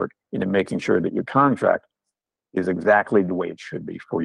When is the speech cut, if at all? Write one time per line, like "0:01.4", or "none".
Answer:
none